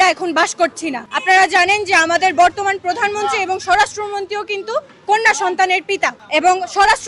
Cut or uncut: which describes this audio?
cut